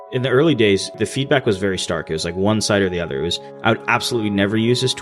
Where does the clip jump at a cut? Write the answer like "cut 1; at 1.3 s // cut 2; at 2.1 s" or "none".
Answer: cut 1; at 1.0 s